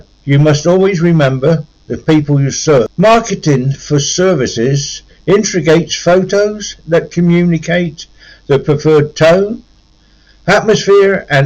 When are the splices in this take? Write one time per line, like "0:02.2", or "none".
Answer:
0:02.9